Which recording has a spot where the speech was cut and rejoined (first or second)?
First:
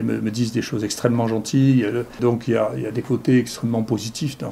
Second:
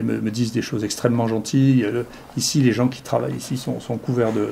first